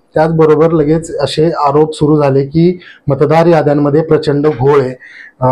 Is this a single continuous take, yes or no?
yes